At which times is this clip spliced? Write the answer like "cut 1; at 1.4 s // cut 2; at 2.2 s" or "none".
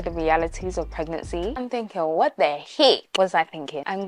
cut 1; at 1.6 s

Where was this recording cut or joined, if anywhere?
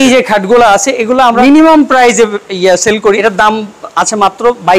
cut 1; at 1.4 s // cut 2; at 3.2 s

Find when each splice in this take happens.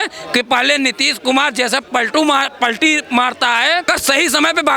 cut 1; at 3.9 s

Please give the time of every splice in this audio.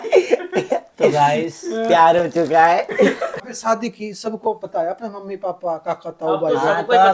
cut 1; at 3.4 s

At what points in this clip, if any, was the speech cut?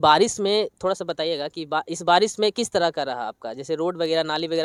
none

